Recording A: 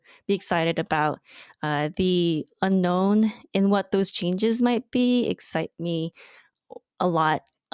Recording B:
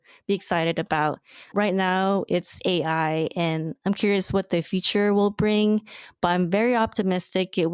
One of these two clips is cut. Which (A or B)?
B